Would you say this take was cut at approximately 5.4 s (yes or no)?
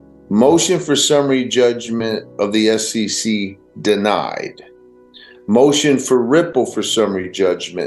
no